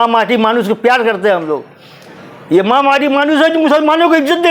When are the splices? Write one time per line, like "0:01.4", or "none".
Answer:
none